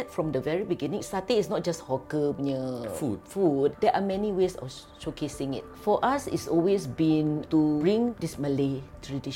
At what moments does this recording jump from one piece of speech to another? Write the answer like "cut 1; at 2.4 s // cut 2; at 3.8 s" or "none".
cut 1; at 3.8 s // cut 2; at 5.7 s // cut 3; at 8.1 s